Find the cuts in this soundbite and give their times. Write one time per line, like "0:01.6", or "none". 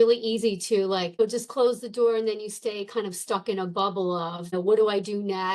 0:01.2
0:04.5